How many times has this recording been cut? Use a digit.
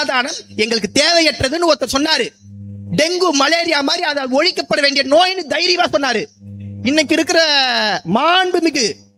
0